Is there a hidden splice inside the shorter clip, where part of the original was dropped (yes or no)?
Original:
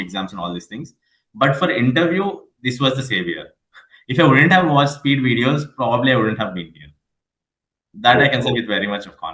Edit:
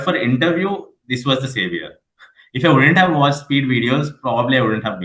no